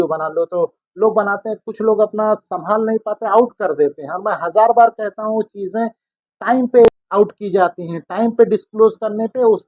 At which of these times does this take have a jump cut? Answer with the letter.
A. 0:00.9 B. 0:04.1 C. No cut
C